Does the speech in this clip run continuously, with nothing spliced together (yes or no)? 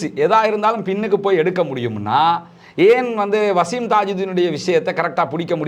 yes